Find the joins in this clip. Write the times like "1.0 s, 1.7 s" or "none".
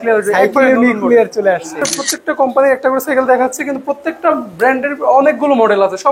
2.2 s